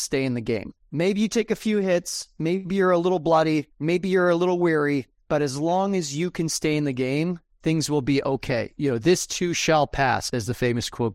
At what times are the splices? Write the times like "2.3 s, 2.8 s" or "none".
10.2 s